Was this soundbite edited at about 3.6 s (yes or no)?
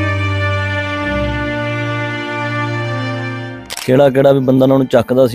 yes